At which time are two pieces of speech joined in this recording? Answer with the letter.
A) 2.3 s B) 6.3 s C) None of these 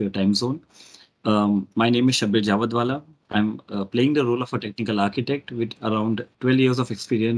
B